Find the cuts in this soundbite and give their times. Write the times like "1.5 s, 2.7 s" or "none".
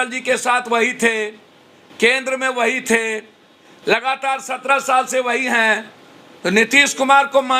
none